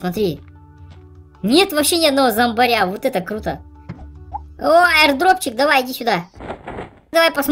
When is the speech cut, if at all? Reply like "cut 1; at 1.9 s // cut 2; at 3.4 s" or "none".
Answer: cut 1; at 4.4 s